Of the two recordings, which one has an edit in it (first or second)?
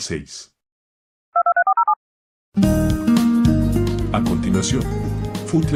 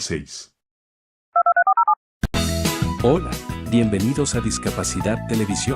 second